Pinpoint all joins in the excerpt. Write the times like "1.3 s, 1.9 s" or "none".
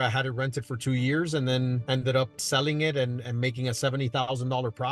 none